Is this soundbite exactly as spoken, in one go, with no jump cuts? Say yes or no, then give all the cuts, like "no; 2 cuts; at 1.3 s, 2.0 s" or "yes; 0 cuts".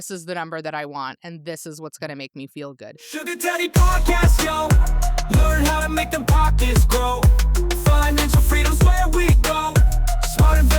no; 1 cut; at 2.9 s